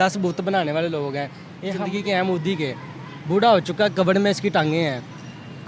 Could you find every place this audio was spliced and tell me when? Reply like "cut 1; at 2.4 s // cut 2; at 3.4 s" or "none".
cut 1; at 1.8 s